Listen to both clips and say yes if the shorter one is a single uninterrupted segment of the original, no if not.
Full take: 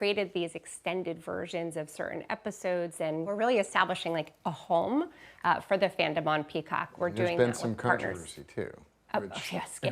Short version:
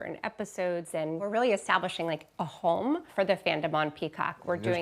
no